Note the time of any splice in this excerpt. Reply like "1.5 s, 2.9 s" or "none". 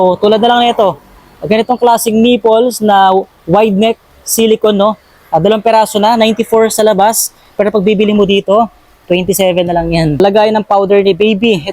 10.2 s